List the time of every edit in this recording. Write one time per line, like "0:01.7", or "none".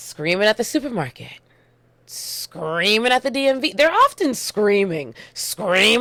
none